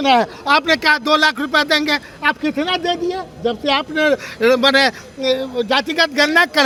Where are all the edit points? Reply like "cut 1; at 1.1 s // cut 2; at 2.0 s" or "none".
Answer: none